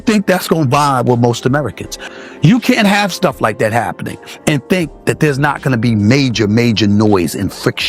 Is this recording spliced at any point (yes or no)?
yes